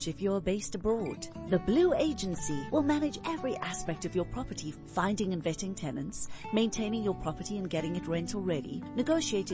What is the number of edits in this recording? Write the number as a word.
zero